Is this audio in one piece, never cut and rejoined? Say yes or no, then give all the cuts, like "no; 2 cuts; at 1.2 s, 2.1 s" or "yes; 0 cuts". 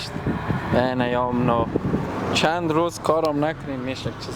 yes; 0 cuts